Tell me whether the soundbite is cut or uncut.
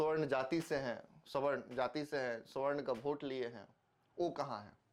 uncut